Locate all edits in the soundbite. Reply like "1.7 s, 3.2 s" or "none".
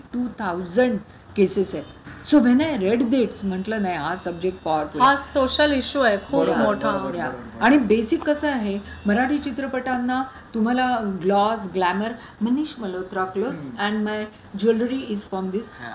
none